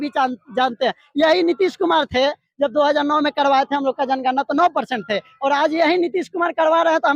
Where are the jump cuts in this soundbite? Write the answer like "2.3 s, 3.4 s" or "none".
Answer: none